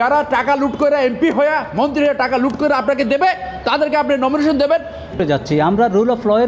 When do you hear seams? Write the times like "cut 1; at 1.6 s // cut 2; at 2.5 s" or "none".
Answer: cut 1; at 5.2 s

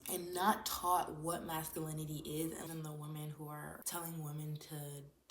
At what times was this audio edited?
cut 1; at 2.7 s // cut 2; at 3.8 s

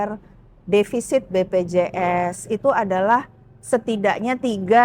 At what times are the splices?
none

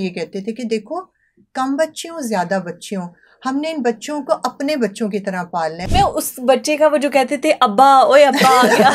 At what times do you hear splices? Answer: cut 1; at 5.8 s

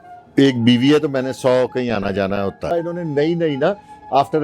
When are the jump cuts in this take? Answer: cut 1; at 2.7 s

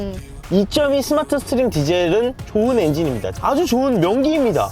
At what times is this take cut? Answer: cut 1; at 2.4 s // cut 2; at 3.3 s

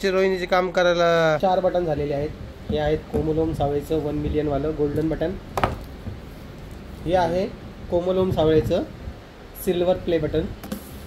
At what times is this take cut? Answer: cut 1; at 1.4 s

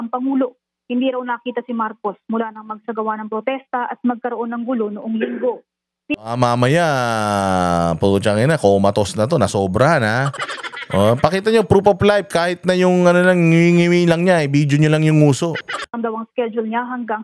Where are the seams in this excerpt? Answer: cut 1; at 6.1 s // cut 2; at 15.8 s

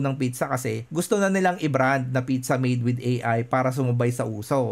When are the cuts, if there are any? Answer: none

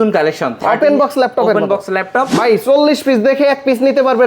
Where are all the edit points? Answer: cut 1; at 2.4 s

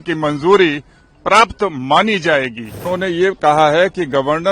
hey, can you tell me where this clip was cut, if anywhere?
cut 1; at 2.8 s

